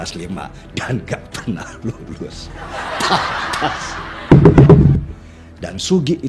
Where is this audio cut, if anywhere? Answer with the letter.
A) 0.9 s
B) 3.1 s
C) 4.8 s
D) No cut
C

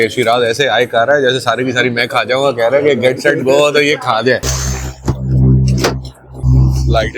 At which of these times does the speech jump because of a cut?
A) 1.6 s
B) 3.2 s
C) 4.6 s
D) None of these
C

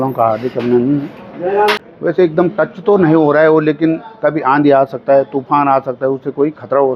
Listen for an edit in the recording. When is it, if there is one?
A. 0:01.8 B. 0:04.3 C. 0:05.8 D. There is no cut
A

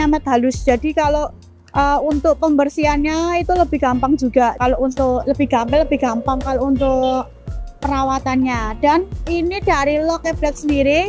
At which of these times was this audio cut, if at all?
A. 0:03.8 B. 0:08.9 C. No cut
C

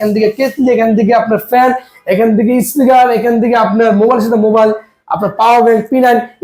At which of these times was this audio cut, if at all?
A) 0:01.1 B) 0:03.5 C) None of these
C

